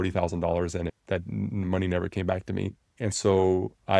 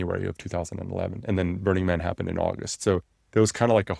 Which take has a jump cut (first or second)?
first